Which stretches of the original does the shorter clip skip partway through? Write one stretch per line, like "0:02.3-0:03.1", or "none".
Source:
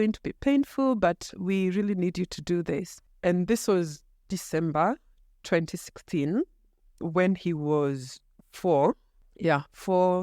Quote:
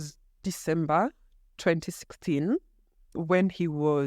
none